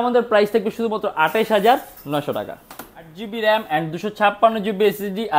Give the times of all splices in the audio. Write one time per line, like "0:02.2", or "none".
0:03.2